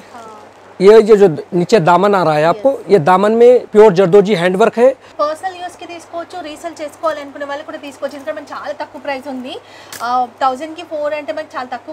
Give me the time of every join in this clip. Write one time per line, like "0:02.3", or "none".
0:03.7
0:05.2